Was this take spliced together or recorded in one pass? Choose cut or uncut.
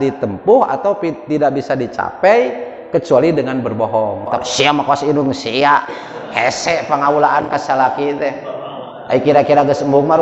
cut